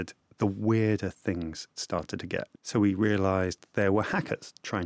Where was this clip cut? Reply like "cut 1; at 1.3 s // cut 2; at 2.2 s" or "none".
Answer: cut 1; at 2.6 s